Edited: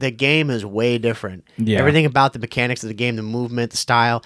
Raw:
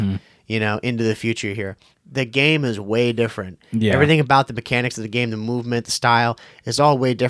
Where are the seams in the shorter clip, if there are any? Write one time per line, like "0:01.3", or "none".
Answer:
none